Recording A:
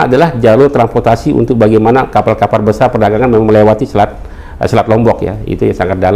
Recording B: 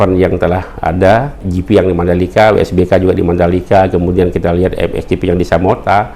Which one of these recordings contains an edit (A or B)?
B